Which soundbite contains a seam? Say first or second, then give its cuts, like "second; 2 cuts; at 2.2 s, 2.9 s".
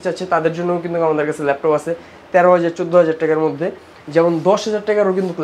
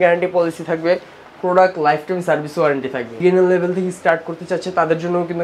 second; 1 cut; at 3.2 s